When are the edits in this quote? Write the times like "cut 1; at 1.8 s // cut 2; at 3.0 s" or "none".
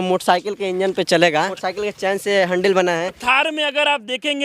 cut 1; at 1.5 s // cut 2; at 3.2 s